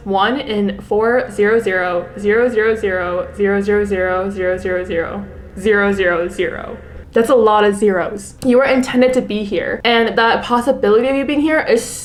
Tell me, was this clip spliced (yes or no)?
no